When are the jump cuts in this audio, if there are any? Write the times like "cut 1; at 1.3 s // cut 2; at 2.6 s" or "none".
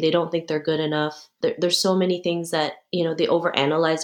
cut 1; at 1.3 s // cut 2; at 2.8 s